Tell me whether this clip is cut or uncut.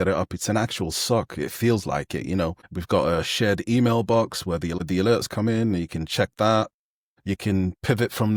uncut